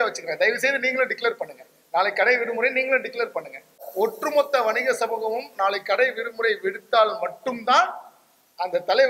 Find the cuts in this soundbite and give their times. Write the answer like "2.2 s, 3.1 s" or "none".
3.8 s